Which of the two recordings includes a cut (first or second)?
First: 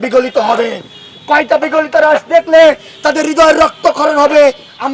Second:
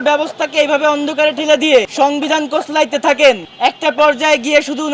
second